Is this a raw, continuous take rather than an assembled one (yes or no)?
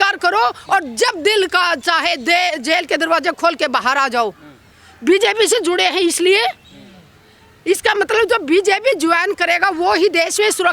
yes